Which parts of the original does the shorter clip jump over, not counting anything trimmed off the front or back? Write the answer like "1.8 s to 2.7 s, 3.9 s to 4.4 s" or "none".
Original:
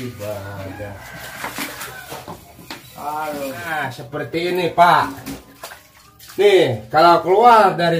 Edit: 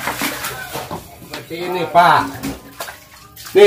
2.9 s to 4.3 s